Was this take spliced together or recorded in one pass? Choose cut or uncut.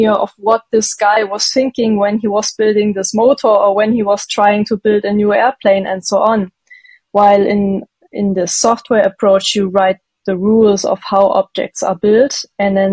uncut